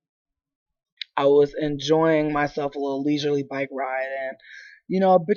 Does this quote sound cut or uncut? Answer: uncut